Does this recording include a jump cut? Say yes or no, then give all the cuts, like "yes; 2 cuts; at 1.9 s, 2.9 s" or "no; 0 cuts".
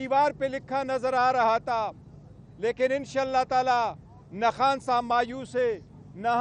no; 0 cuts